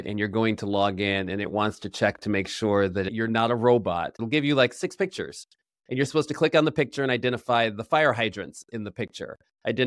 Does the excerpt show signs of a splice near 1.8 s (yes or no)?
no